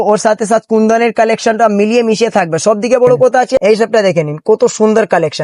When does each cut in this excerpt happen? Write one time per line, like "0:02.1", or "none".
0:03.6